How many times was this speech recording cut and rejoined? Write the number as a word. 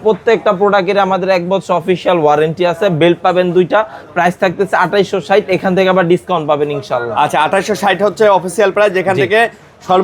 zero